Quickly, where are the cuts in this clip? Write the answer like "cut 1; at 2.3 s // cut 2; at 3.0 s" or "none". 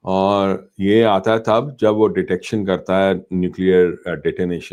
none

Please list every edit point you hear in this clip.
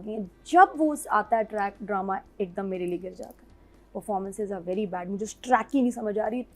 none

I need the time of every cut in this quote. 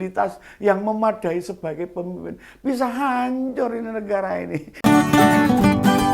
cut 1; at 4.7 s

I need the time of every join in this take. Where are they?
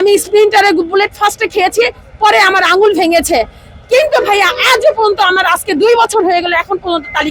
none

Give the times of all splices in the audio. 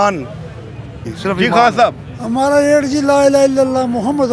cut 1; at 1.1 s

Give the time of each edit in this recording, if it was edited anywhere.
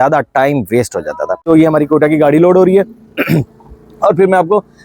cut 1; at 1.5 s

